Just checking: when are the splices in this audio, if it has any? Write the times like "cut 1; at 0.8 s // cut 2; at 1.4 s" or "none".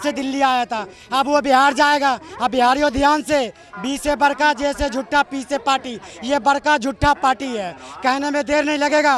none